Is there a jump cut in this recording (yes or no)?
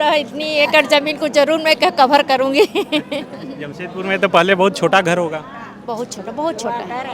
no